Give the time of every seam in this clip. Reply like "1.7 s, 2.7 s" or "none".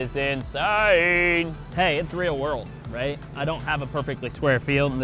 1.6 s